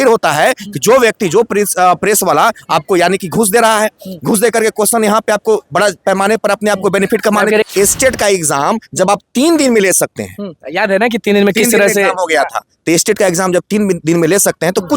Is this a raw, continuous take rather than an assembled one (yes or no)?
no